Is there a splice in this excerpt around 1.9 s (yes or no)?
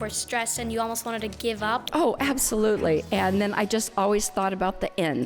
yes